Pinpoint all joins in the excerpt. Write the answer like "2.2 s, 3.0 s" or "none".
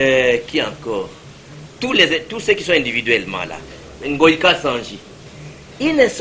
none